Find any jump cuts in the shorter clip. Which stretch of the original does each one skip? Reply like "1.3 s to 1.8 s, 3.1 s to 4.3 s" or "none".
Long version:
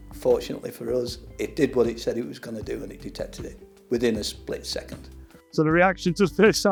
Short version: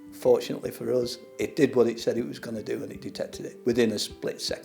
3.4 s to 3.7 s